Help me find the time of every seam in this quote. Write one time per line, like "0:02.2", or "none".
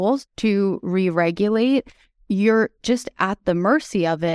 none